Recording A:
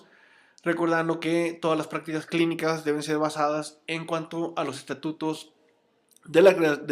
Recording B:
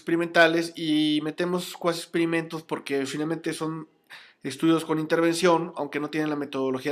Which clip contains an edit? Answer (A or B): A